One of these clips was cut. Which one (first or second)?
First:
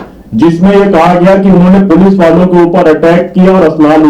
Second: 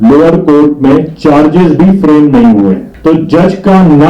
second